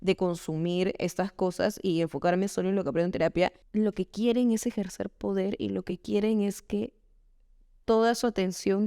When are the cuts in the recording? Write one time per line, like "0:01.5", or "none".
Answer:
0:03.6

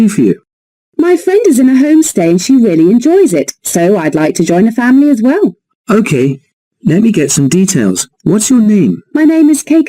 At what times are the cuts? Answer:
0:02.4

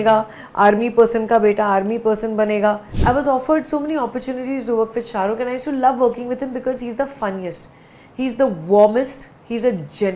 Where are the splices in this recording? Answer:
0:02.9

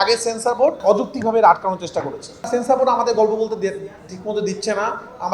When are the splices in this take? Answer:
0:00.8
0:02.5

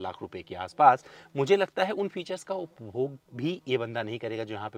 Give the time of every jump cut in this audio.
none

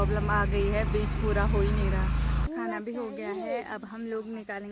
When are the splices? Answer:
0:02.5

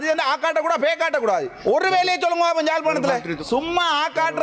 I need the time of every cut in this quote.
0:01.5
0:03.3

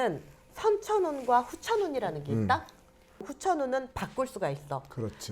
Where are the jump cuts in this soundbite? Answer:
0:03.3

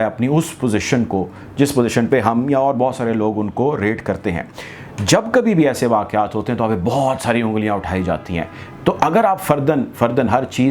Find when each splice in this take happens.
none

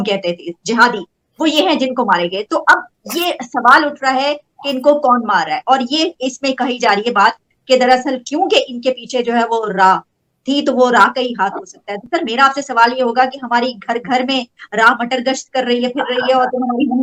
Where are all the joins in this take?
none

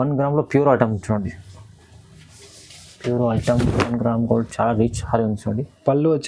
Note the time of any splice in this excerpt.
none

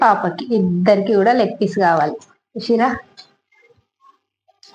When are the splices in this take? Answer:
none

